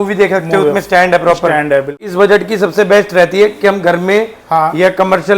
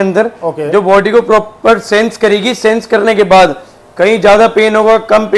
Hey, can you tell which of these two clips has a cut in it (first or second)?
first